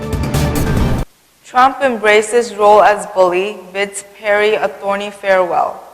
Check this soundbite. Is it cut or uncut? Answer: cut